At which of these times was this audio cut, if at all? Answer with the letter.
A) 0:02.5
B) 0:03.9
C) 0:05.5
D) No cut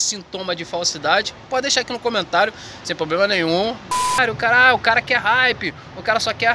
B